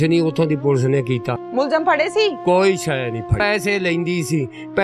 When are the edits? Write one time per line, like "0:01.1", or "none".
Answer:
0:01.4
0:03.4